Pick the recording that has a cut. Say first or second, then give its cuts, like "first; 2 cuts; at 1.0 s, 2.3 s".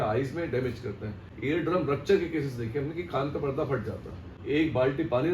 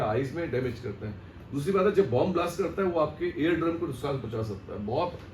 first; 2 cuts; at 1.3 s, 4.3 s